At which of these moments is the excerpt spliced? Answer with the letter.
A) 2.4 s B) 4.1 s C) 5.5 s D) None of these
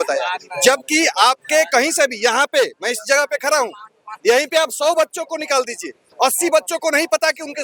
D